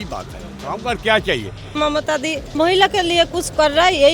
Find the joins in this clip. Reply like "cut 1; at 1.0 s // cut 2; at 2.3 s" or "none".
cut 1; at 2.0 s